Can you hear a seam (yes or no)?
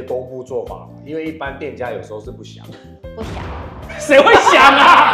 no